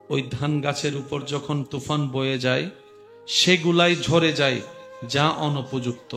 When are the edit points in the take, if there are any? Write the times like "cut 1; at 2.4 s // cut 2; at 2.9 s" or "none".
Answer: none